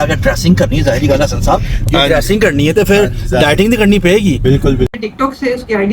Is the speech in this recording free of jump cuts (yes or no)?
no